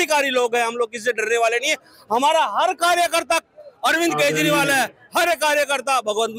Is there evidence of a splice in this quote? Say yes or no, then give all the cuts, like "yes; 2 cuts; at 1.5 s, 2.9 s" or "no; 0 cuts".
no; 0 cuts